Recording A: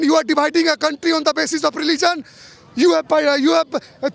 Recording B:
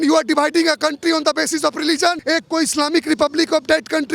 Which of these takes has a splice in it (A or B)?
B